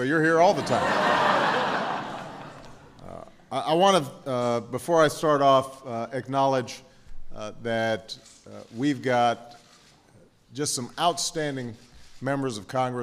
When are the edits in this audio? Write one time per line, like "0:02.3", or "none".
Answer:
0:06.5